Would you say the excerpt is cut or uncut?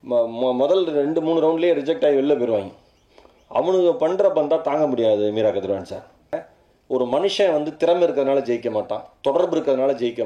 cut